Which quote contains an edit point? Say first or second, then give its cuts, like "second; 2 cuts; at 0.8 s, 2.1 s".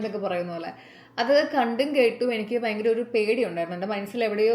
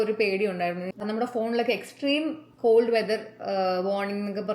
second; 1 cut; at 1.0 s